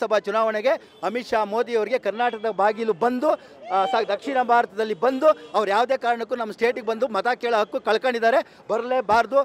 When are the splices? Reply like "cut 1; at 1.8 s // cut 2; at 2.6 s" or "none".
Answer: none